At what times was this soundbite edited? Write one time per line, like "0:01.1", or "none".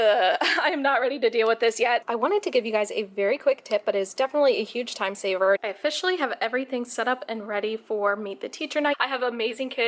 0:02.0
0:05.6
0:08.9